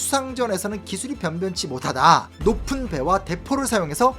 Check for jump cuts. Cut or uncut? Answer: cut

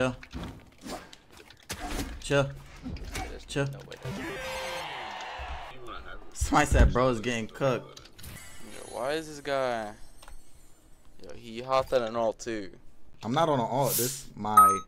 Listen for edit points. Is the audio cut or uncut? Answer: uncut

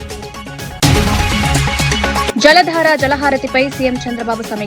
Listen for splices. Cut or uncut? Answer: cut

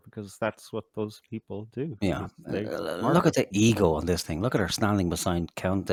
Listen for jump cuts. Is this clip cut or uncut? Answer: uncut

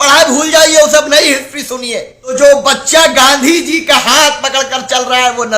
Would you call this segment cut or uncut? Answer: cut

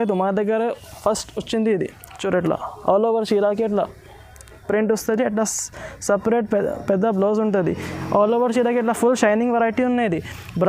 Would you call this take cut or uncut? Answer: uncut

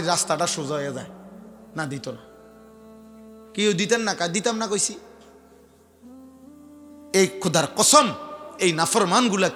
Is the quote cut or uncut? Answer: uncut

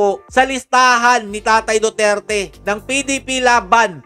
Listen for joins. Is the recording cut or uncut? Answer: uncut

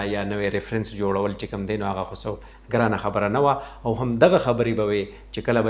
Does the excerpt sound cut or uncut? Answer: uncut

